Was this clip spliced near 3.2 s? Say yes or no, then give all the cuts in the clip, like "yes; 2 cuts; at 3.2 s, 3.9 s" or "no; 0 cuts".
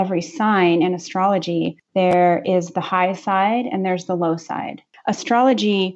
no; 2 cuts; at 1.8 s, 4.8 s